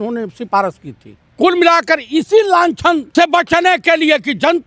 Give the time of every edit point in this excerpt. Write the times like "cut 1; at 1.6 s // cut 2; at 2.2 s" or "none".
cut 1; at 1.3 s // cut 2; at 3.1 s